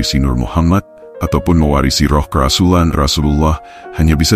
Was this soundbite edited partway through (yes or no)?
yes